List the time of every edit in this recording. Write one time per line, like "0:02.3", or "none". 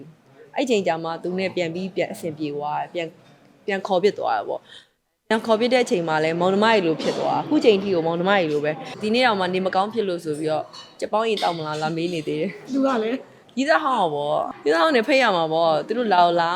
0:08.9
0:14.5